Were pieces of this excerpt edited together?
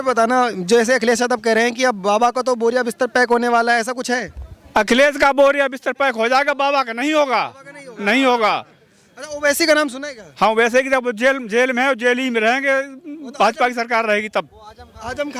no; 0 cuts

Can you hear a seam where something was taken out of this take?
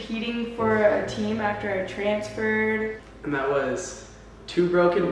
yes; 1 cut; at 3.1 s

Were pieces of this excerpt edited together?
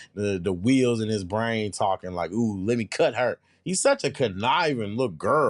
no; 0 cuts

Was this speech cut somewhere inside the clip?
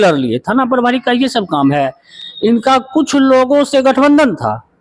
no; 0 cuts

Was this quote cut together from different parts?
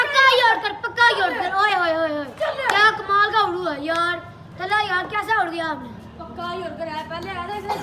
no; 0 cuts

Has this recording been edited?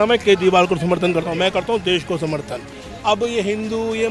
yes; 1 cut; at 2.9 s

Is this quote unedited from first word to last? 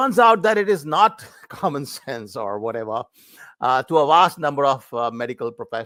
yes; 0 cuts

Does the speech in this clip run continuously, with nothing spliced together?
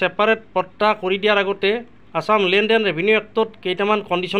yes; 0 cuts

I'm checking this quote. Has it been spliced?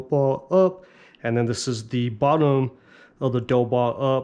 no; 0 cuts

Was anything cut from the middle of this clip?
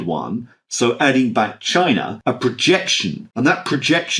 yes; 2 cuts; at 2.1 s, 3.2 s

